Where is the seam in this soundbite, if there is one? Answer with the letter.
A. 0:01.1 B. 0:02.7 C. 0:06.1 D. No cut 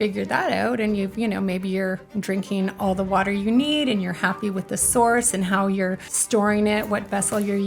C